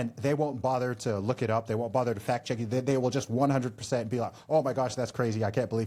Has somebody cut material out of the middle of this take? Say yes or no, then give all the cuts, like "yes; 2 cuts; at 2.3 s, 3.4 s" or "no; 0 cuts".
no; 0 cuts